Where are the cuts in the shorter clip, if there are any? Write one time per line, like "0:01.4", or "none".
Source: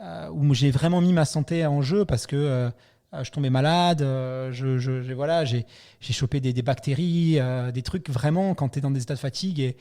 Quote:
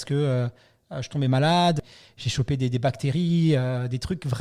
0:01.8